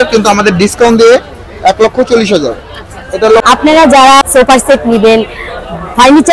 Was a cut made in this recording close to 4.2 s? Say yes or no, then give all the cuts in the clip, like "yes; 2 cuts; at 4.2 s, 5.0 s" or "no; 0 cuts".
yes; 2 cuts; at 3.4 s, 4.2 s